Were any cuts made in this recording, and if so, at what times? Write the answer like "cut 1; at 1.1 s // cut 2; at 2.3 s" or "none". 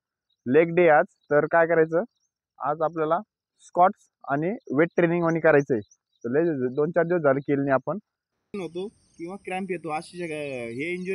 cut 1; at 8.5 s